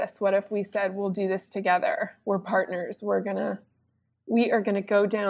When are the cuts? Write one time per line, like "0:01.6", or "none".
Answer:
none